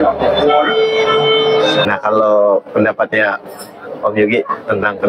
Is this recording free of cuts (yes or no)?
no